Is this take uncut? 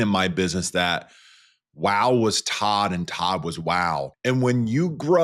no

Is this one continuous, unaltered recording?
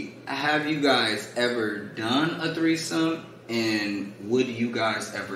yes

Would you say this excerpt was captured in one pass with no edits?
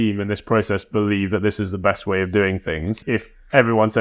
no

